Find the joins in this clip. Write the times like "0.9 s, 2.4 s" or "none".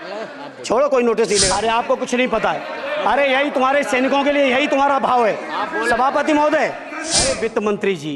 1.5 s, 7.3 s